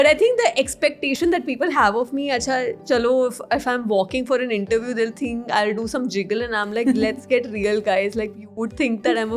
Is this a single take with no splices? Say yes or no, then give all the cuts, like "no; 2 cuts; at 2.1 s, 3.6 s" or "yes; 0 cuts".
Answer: yes; 0 cuts